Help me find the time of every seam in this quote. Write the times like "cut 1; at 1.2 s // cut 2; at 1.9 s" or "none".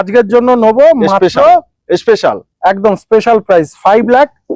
none